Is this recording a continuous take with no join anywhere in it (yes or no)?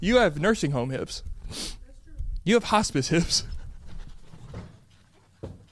yes